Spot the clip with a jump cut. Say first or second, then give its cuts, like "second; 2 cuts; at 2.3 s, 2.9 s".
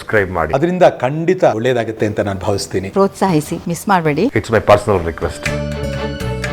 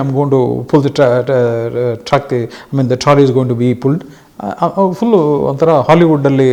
first; 1 cut; at 5.4 s